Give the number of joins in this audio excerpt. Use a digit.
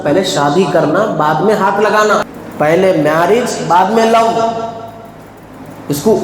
1